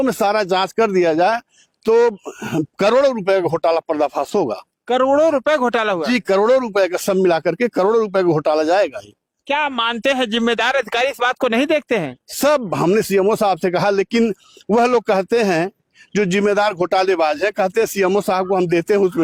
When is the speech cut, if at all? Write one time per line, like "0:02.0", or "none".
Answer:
none